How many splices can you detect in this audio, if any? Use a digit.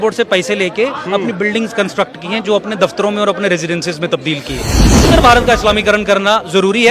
1